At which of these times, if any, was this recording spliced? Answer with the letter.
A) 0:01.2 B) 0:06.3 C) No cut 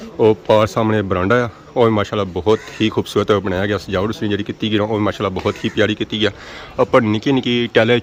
C